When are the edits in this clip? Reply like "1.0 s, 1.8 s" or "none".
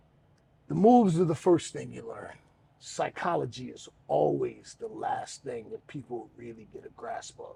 none

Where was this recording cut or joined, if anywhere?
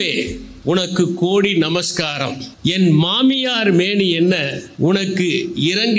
2.4 s, 4.6 s

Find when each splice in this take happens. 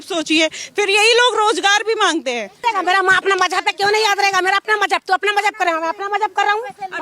2.5 s

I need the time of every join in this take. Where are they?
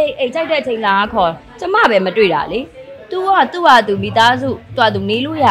none

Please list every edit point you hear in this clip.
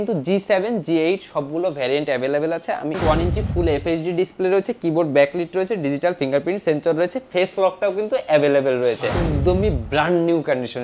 3.0 s, 9.3 s

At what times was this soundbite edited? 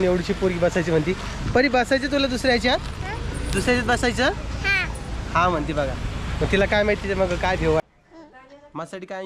7.8 s

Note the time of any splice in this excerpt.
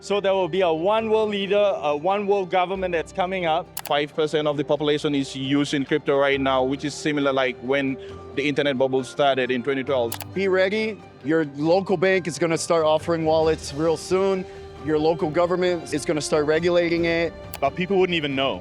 3.8 s, 10.1 s, 15.9 s, 17.4 s

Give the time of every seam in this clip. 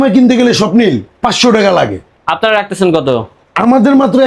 none

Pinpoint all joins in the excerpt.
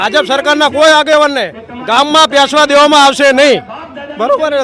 none

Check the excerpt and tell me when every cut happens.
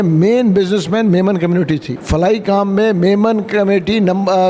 1.9 s

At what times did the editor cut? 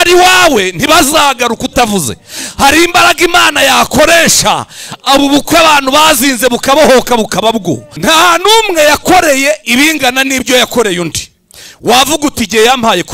7.9 s

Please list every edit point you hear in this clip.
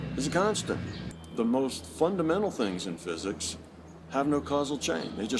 1.0 s

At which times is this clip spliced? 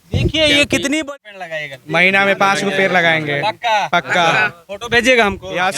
1.0 s

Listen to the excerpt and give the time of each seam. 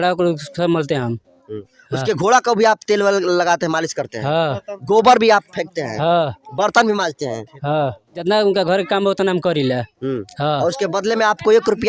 8.2 s

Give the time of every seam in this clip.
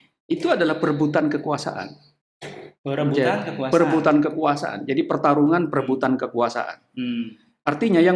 none

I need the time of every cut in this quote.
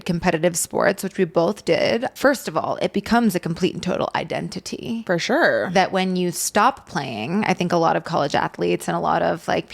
2.1 s

